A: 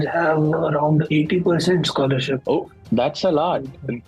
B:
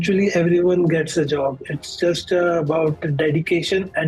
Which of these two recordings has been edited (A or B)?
A